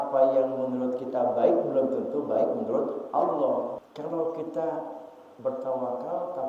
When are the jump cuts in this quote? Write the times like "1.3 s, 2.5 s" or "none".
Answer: 3.8 s